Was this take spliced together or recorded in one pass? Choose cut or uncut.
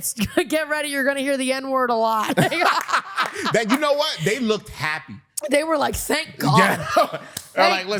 uncut